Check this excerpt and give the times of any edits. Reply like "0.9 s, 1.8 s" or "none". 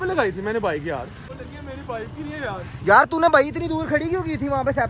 1.2 s